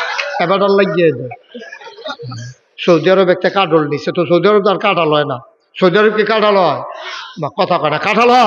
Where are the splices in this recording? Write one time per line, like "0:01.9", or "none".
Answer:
0:02.6